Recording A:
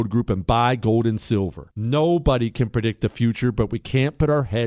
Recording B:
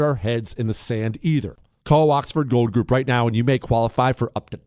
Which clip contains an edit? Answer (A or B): B